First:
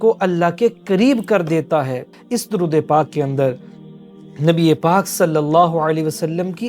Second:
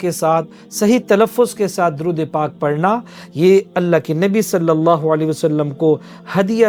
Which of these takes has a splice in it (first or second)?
first